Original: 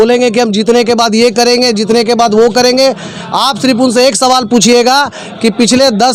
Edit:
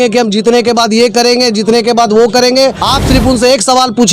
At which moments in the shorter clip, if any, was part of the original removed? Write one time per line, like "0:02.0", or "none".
0:02.8